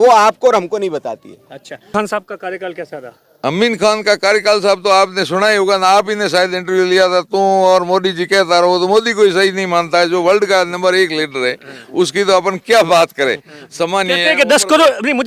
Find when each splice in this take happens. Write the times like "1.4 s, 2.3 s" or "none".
1.9 s